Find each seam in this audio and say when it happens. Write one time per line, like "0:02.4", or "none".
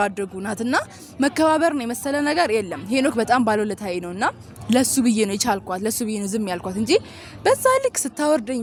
none